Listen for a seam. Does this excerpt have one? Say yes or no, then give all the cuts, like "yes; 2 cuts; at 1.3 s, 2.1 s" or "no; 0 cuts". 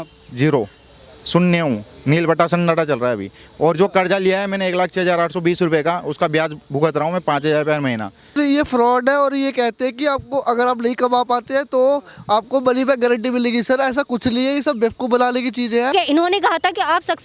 yes; 2 cuts; at 8.4 s, 15.9 s